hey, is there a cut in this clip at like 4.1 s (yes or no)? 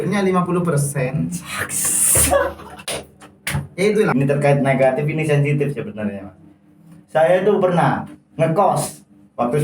yes